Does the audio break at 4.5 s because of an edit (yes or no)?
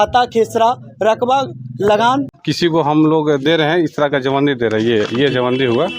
no